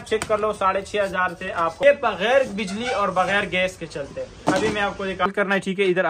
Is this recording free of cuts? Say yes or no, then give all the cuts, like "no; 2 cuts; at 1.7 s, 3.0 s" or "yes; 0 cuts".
no; 2 cuts; at 1.8 s, 5.3 s